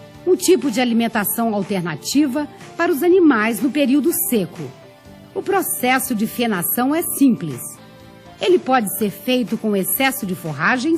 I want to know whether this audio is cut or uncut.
cut